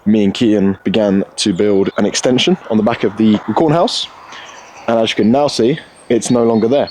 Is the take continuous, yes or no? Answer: no